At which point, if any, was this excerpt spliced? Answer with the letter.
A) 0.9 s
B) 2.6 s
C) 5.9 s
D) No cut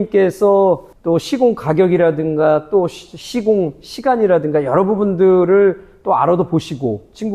A